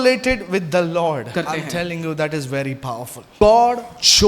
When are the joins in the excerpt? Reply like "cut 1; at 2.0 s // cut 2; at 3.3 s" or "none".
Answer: cut 1; at 1.3 s // cut 2; at 3.4 s